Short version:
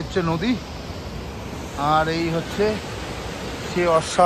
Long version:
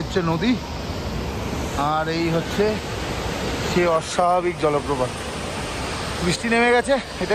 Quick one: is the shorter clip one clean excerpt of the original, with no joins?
yes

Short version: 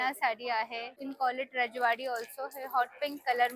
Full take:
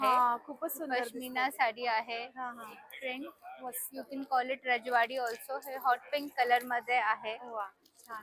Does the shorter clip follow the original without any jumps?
no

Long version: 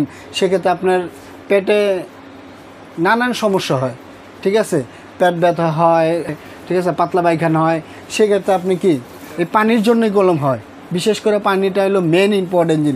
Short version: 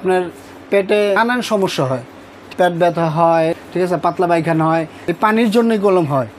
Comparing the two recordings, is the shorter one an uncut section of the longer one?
no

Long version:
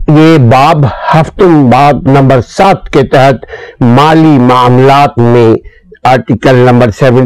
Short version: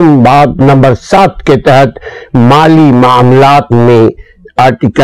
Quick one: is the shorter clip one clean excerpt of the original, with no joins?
yes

